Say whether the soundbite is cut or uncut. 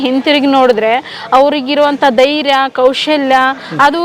uncut